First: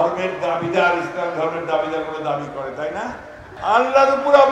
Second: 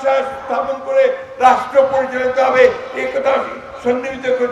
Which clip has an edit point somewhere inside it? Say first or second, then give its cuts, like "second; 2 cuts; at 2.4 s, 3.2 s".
first; 1 cut; at 3.5 s